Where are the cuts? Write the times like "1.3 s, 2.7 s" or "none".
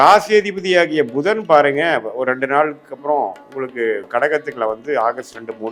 none